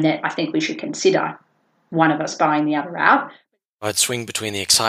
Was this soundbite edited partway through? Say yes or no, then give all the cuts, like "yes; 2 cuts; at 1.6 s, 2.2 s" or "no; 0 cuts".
yes; 1 cut; at 3.3 s